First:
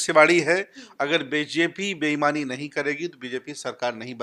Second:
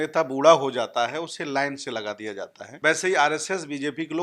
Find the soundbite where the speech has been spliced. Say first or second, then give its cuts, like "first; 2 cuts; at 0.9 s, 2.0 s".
second; 1 cut; at 2.6 s